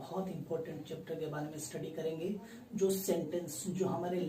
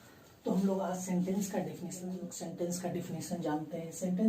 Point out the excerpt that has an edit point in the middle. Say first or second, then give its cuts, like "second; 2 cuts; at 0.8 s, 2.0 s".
second; 1 cut; at 2.3 s